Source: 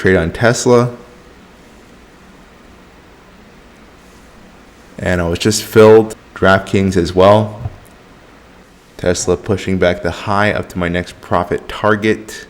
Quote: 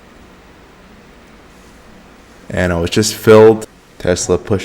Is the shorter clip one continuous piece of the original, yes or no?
no